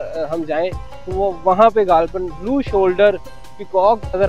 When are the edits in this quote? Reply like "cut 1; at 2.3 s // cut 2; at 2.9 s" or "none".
none